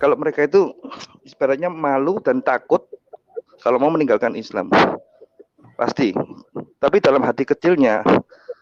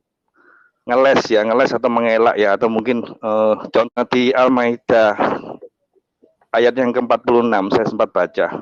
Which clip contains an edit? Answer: second; 1 cut; at 3.9 s

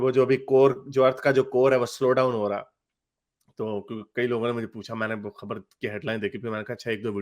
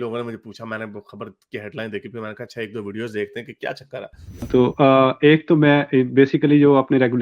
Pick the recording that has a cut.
second; 1 cut; at 4.5 s

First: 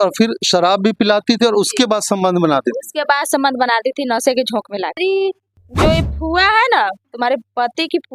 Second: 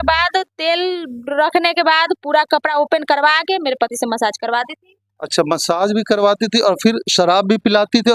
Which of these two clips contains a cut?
first; 1 cut; at 5.0 s

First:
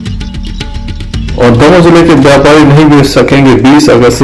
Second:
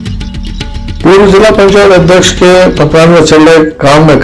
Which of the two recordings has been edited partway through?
second; 1 cut; at 1.0 s

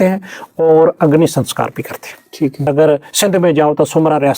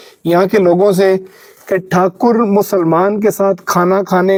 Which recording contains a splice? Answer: first; 1 cut; at 2.6 s

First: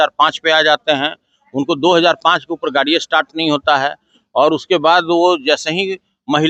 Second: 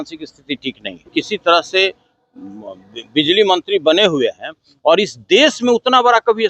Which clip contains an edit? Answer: second; 1 cut; at 1.1 s

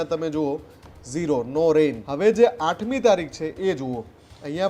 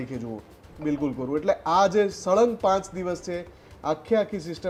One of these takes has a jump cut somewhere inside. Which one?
first; 1 cut; at 2.0 s

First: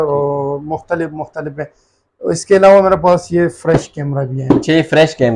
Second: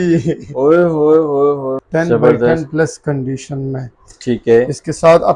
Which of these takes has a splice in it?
second; 1 cut; at 1.8 s

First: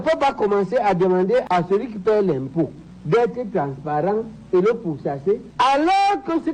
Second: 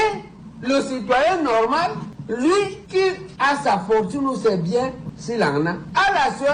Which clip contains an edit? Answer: first; 2 cuts; at 1.4 s, 5.5 s

